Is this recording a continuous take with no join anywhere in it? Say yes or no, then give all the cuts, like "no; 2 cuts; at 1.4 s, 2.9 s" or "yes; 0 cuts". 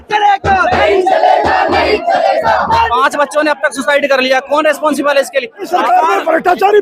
no; 2 cuts; at 2.9 s, 5.6 s